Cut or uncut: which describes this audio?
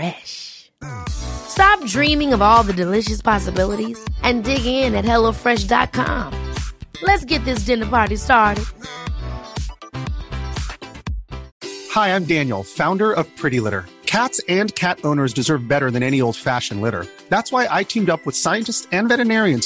cut